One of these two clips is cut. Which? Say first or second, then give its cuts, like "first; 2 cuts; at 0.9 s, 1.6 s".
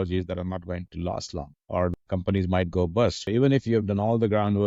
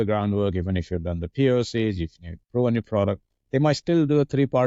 first; 2 cuts; at 1.8 s, 3.3 s